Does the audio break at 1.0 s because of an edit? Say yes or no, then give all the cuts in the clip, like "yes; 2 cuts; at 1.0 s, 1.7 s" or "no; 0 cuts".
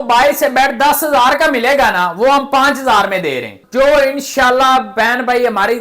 no; 1 cut; at 3.6 s